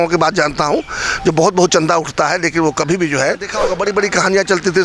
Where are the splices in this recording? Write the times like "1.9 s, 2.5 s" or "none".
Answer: 3.6 s